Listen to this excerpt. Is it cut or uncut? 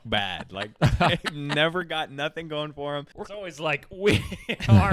cut